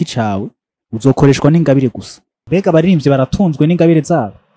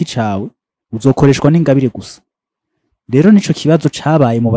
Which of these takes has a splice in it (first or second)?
first